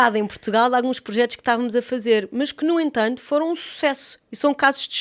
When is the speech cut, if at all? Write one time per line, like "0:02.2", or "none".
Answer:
none